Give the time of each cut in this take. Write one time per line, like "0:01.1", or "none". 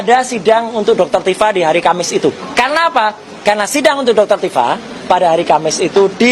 0:02.4

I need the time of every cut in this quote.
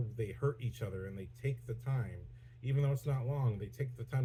none

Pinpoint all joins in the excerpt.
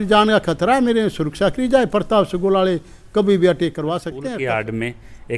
0:04.1

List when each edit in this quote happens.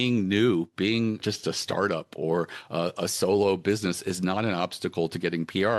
0:01.2

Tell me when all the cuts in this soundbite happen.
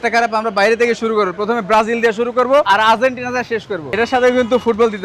0:03.8

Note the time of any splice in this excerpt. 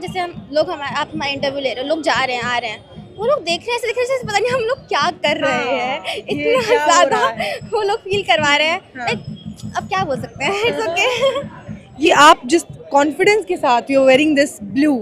0:12.1

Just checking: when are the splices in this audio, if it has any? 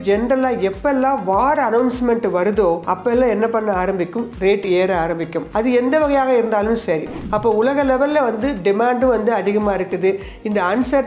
0:02.8
0:05.4
0:07.2

